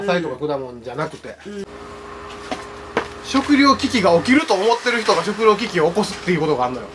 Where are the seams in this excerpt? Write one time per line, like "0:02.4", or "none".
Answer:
0:01.6